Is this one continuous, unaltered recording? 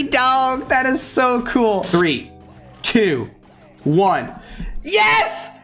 no; 1 cut; at 1.8 s

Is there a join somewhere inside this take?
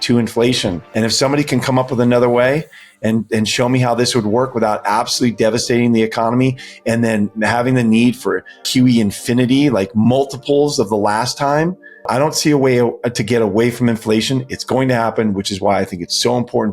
yes; 3 cuts; at 0.8 s, 8.6 s, 12.1 s

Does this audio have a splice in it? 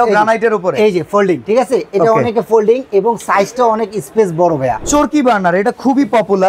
yes; 2 cuts; at 1.4 s, 4.8 s

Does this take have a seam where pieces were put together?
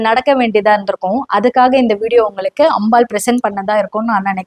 no; 0 cuts

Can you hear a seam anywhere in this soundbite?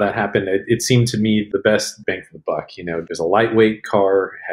yes; 1 cut; at 3.0 s

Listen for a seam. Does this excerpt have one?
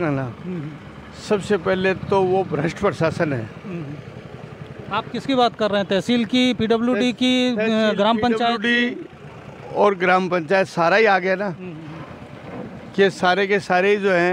no; 0 cuts

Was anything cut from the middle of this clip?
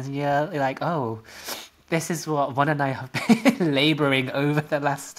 no; 0 cuts

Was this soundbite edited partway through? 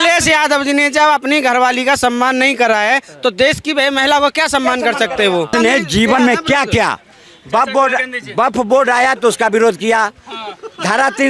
yes; 1 cut; at 5.5 s

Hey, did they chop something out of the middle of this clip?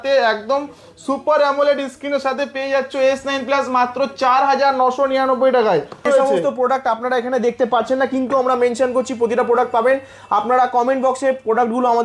yes; 1 cut; at 6.0 s

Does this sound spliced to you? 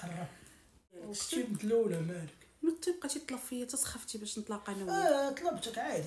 yes; 1 cut; at 1.1 s

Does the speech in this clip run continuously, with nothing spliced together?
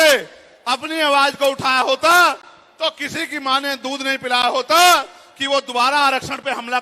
yes; 0 cuts

